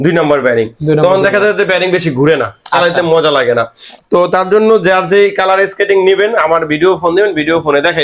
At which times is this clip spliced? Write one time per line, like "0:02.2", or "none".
none